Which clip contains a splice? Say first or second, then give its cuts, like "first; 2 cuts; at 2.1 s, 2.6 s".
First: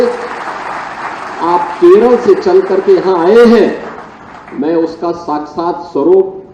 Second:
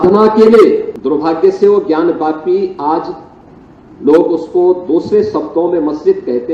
second; 1 cut; at 0.9 s